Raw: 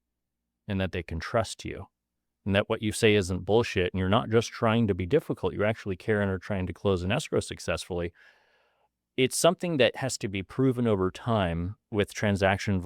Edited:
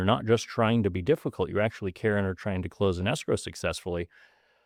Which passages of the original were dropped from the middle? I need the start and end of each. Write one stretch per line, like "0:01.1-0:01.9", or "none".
none